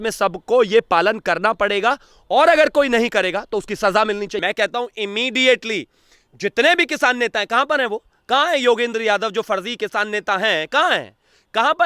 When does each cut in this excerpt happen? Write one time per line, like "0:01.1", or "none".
0:04.4

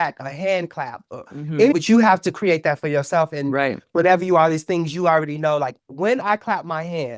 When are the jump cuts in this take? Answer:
none

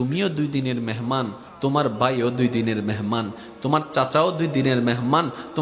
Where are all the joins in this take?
0:01.4

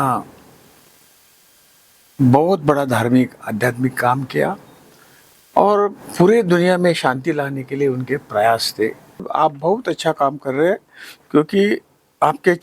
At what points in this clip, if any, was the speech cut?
0:09.3

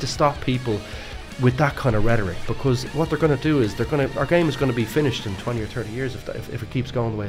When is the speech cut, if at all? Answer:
none

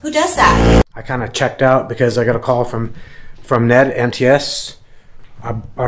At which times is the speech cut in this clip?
0:00.9

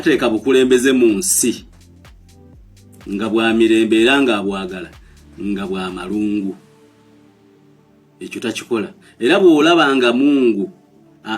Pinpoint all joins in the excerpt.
0:01.8
0:03.0

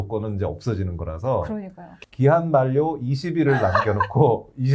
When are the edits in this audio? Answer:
0:01.9

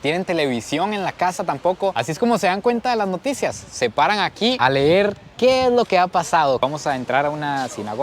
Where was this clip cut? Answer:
0:06.6

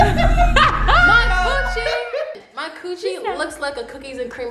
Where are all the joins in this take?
none

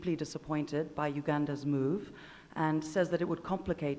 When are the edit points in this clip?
none

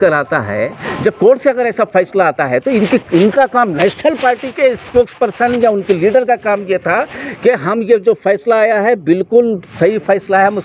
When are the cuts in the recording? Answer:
none

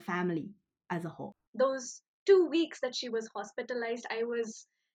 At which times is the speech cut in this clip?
0:01.3

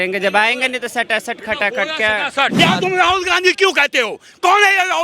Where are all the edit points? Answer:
0:02.6

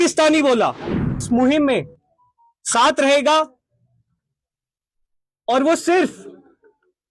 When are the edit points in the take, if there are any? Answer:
0:01.2

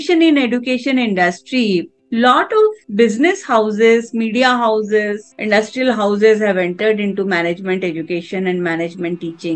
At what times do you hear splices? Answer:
none

